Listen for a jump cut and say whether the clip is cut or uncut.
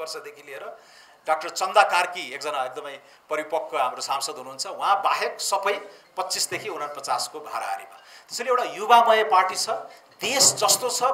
uncut